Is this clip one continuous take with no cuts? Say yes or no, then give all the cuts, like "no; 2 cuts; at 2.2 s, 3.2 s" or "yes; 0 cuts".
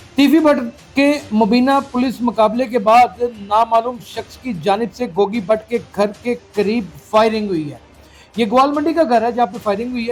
yes; 0 cuts